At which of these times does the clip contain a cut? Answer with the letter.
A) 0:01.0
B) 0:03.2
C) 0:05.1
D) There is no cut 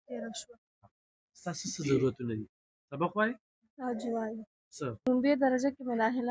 C